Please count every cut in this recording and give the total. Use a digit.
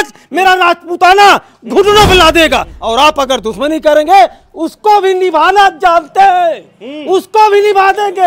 1